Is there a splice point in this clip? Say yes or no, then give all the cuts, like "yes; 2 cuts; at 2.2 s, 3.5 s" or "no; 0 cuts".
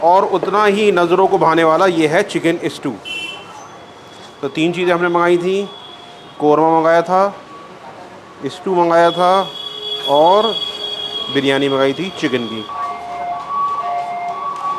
no; 0 cuts